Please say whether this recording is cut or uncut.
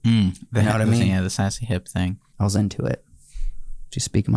cut